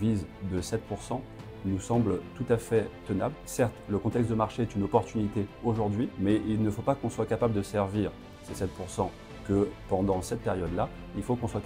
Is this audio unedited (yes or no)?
no